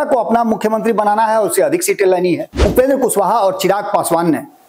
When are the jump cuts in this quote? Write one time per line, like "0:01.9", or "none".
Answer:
0:02.5

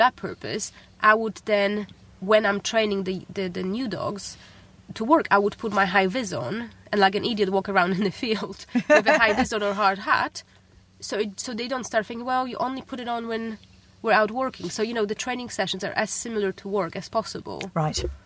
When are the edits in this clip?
none

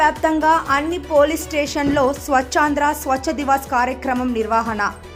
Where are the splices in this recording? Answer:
none

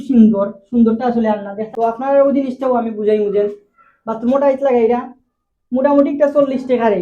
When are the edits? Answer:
0:01.7

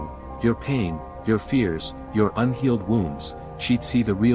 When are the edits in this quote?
none

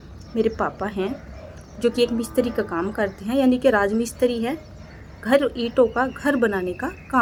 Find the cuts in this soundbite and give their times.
none

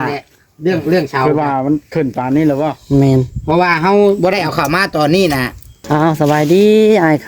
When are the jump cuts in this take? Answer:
0:05.7

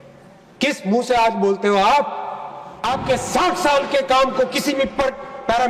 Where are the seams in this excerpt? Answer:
0:02.8

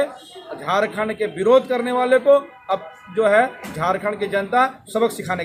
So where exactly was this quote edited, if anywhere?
none

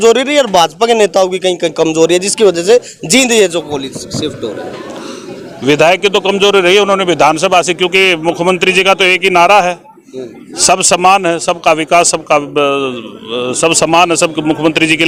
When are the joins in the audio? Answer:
none

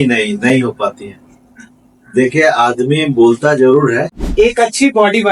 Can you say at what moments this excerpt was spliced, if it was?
0:04.2

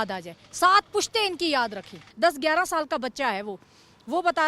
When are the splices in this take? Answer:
0:02.1

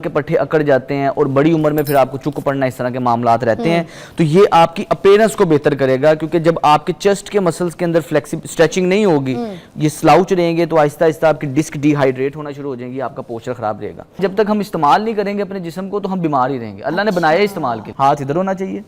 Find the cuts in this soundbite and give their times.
0:14.2
0:17.9

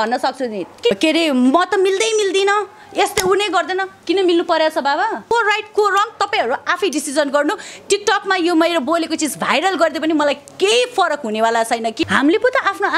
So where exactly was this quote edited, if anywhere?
0:00.9
0:05.3
0:12.0

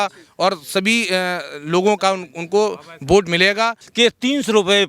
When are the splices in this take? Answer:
0:03.8

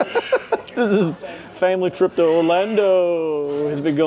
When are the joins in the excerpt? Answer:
none

